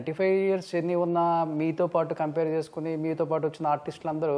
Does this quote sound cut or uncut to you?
uncut